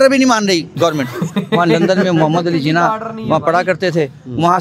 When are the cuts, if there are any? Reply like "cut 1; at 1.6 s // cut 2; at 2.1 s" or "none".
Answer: cut 1; at 1.4 s